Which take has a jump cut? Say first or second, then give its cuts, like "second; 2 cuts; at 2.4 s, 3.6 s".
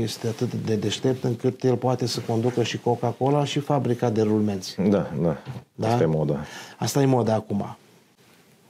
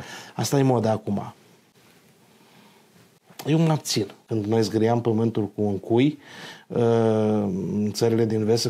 second; 1 cut; at 4.2 s